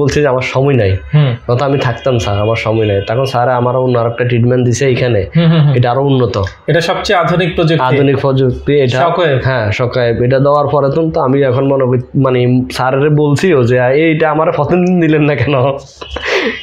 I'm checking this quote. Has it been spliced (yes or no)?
no